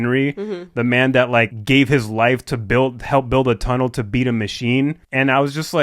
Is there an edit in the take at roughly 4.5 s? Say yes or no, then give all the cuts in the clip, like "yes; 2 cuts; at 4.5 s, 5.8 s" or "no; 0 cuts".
no; 1 cut; at 1.6 s